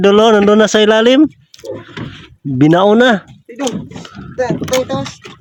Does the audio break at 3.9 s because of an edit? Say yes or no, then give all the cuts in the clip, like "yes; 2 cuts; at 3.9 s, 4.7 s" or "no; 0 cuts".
no; 0 cuts